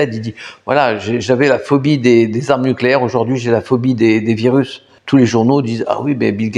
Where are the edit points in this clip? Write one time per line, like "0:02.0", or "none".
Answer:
0:04.9